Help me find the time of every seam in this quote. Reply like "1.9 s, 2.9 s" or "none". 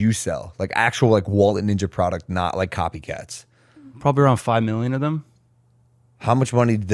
none